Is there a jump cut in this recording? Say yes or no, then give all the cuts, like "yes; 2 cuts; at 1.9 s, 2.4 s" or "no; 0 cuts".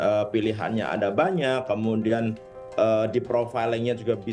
no; 0 cuts